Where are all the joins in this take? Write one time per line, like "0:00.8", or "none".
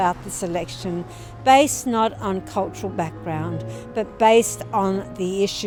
none